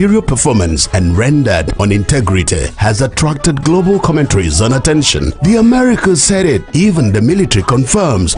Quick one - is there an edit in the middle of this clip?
no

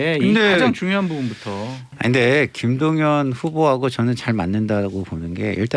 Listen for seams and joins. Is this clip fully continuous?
no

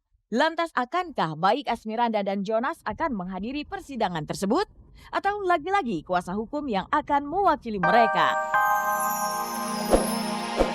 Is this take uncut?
no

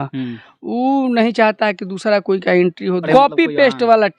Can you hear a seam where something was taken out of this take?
yes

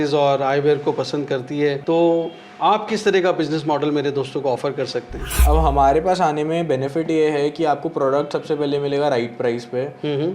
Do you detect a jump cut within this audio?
yes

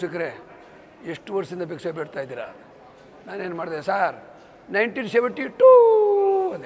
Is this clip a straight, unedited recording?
yes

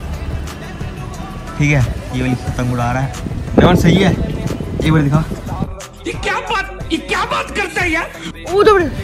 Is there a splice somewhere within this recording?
no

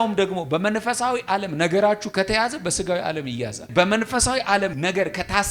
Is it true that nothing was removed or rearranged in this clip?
no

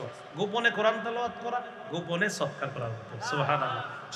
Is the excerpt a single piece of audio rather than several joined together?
yes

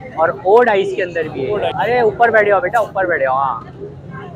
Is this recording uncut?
no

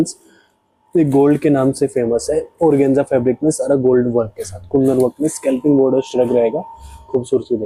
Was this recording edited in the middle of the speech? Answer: no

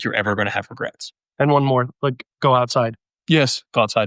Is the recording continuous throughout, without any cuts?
no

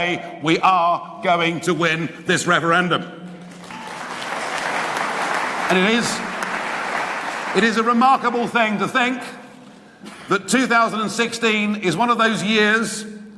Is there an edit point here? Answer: yes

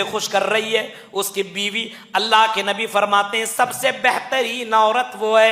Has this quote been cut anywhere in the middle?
no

